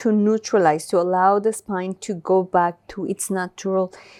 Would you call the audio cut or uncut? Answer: uncut